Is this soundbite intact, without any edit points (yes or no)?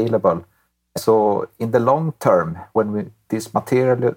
no